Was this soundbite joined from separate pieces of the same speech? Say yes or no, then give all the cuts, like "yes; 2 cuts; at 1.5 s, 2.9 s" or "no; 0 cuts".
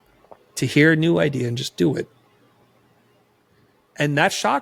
no; 0 cuts